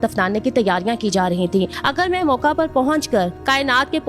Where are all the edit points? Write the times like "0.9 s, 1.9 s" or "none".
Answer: none